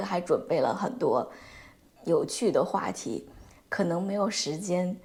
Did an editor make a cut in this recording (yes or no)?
no